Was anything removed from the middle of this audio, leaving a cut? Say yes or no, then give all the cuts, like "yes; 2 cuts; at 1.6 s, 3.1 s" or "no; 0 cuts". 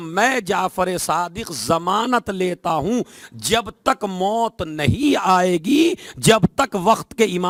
no; 0 cuts